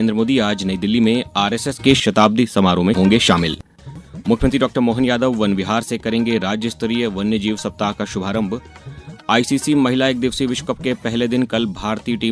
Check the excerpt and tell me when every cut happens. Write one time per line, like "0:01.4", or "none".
none